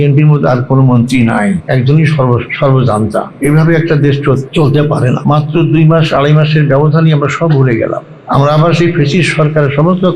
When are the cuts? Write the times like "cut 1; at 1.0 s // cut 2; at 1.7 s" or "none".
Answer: cut 1; at 1.6 s // cut 2; at 2.5 s // cut 3; at 3.3 s // cut 4; at 4.5 s // cut 5; at 5.2 s // cut 6; at 8.1 s

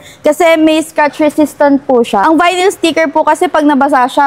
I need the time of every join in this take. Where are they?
cut 1; at 2.2 s

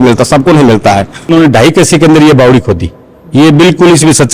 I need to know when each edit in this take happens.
cut 1; at 1.3 s

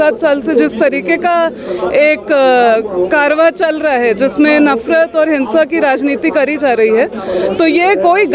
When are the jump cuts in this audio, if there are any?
none

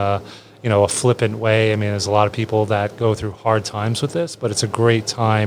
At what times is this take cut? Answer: none

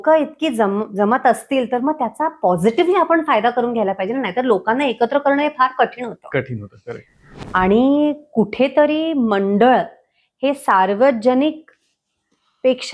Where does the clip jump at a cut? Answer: cut 1; at 7.1 s

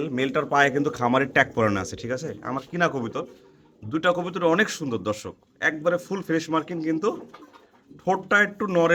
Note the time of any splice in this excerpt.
none

